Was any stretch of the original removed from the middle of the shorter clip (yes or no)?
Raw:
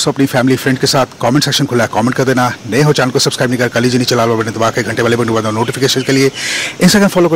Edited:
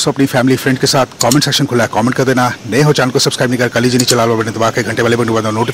no